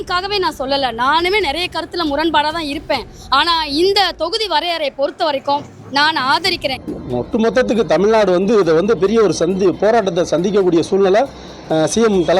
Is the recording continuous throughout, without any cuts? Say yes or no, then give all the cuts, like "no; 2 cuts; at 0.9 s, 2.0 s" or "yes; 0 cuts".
no; 1 cut; at 6.7 s